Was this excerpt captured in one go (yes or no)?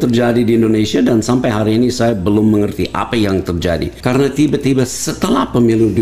no